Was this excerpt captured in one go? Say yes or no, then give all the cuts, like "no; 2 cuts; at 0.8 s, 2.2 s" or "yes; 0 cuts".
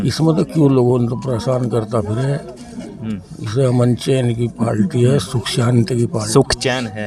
yes; 0 cuts